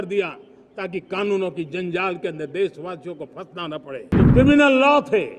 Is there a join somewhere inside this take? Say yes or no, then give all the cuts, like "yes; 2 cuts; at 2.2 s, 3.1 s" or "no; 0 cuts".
yes; 1 cut; at 4.2 s